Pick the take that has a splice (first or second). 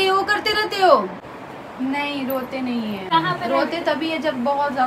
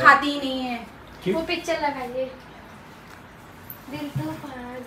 first